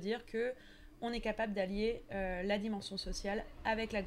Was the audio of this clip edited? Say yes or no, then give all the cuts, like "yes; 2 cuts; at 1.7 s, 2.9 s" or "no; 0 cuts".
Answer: no; 0 cuts